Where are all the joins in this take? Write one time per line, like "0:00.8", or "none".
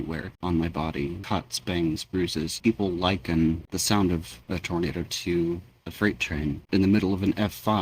0:01.2
0:02.6
0:06.6